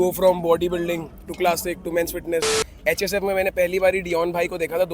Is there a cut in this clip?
yes; 1 cut; at 2.6 s

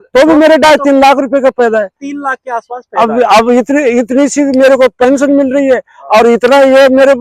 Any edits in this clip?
no; 0 cuts

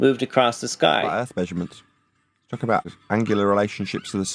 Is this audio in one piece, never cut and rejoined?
no; 2 cuts; at 1.1 s, 2.9 s

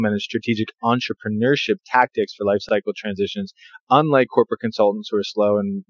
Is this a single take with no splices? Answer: no; 1 cut; at 2.6 s

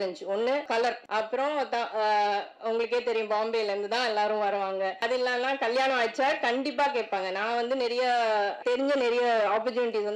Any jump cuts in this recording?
yes; 1 cut; at 8.6 s

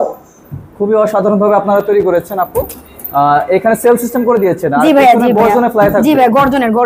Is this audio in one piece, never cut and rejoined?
yes; 0 cuts

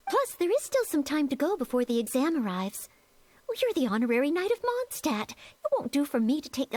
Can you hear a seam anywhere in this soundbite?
no; 0 cuts

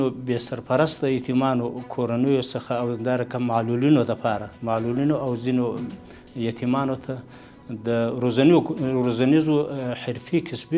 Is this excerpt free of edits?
yes; 0 cuts

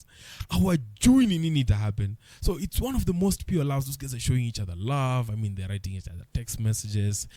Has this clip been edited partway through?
no; 0 cuts

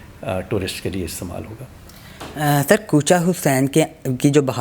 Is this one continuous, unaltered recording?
yes; 0 cuts

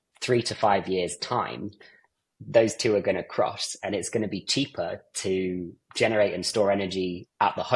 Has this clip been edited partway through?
no; 0 cuts

